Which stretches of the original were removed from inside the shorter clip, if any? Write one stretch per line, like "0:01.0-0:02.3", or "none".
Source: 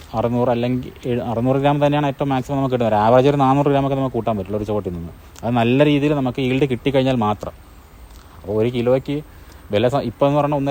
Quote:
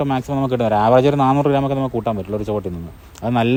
none